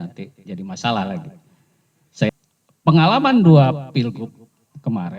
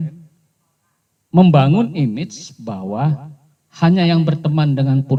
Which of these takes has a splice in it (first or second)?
first